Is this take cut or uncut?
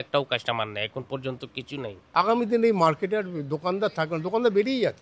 cut